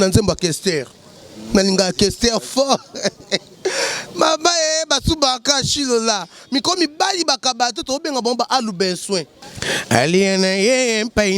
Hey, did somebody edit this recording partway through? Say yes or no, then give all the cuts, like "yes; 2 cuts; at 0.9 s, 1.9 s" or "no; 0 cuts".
yes; 1 cut; at 9.4 s